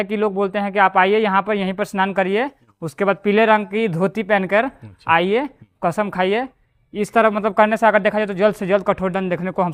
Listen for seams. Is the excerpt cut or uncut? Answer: uncut